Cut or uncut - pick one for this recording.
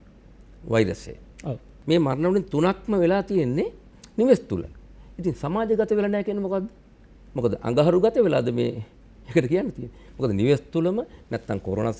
cut